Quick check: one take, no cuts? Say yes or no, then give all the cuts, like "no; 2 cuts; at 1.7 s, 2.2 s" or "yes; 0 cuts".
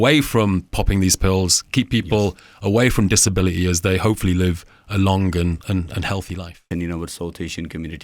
no; 1 cut; at 6.6 s